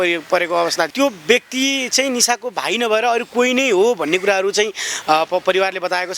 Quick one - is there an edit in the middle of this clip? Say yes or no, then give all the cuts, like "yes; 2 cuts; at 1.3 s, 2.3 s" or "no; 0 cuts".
yes; 1 cut; at 0.9 s